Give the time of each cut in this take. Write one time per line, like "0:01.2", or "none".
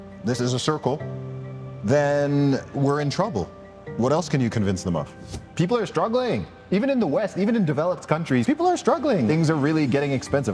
0:05.5
0:08.4
0:09.3